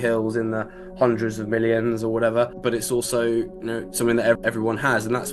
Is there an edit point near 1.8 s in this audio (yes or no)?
no